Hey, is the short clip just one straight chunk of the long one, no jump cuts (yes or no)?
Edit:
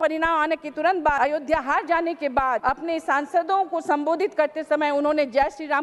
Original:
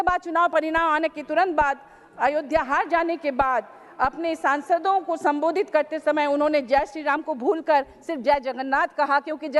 no